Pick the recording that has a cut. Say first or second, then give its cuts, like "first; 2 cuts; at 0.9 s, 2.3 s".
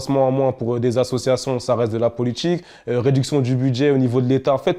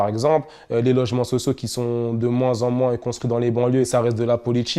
second; 1 cut; at 3.9 s